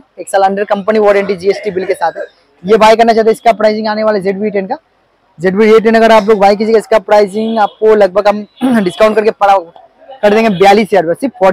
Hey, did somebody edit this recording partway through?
no; 0 cuts

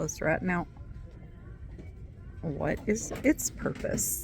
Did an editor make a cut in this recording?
no; 0 cuts

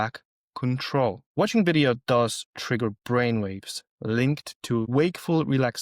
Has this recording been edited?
yes; 2 cuts; at 1.2 s, 4.9 s

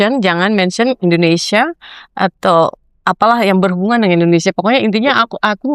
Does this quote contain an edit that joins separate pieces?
no; 0 cuts

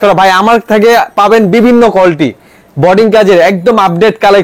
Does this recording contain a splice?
no; 0 cuts

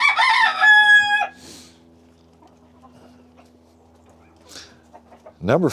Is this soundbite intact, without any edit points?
yes; 0 cuts

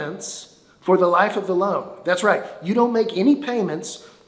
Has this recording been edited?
no; 0 cuts

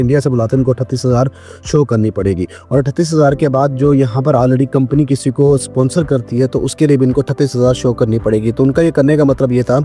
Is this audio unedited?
yes; 0 cuts

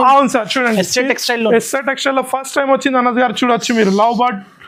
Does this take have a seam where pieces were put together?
no; 0 cuts

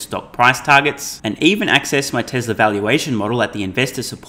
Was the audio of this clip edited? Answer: no; 0 cuts

